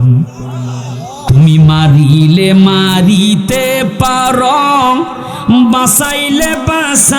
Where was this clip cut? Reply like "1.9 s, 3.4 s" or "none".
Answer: 1.2 s